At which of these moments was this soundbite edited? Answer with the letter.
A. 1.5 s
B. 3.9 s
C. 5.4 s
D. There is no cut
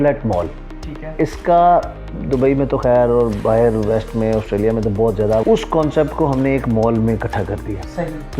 C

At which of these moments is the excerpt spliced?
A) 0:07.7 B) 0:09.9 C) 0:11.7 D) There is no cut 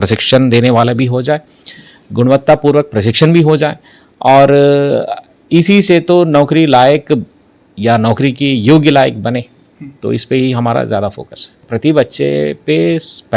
C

